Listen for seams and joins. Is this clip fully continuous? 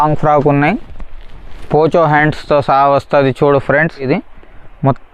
no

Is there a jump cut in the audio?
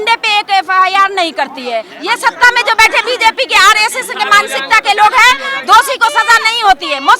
yes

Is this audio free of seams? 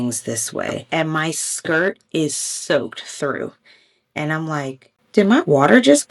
no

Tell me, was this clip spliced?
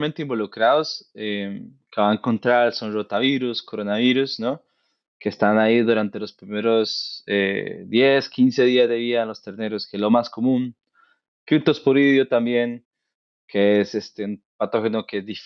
no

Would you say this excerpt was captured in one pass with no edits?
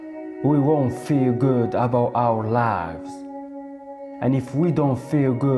yes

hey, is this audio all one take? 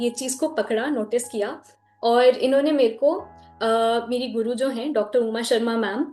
yes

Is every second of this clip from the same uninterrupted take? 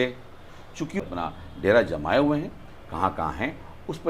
no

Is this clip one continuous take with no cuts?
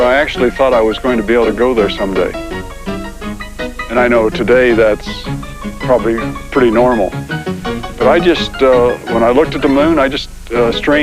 no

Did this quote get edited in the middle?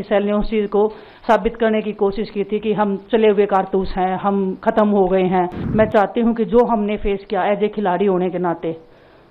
yes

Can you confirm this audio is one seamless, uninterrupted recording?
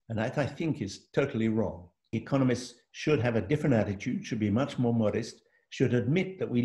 no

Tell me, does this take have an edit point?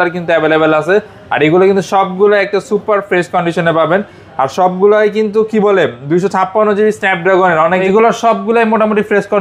yes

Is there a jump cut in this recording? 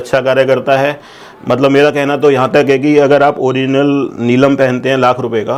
no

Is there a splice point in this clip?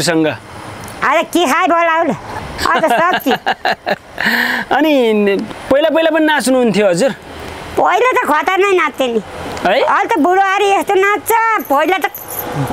yes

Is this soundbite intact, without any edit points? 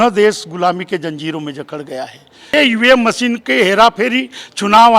no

